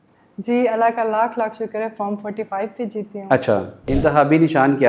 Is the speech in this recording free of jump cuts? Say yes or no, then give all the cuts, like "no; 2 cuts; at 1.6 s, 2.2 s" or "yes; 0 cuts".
no; 1 cut; at 3.9 s